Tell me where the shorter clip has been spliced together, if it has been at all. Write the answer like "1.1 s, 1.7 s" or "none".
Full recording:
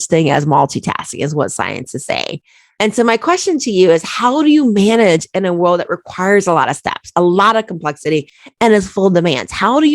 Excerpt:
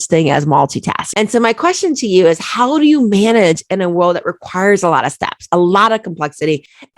1.0 s